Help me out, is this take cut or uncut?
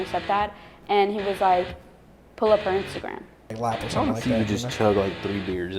cut